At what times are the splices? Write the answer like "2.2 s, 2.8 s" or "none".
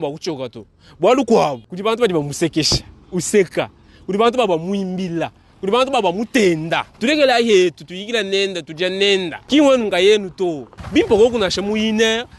1.7 s, 6.9 s, 9.4 s, 10.6 s